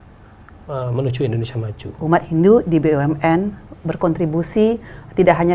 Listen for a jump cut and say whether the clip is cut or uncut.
cut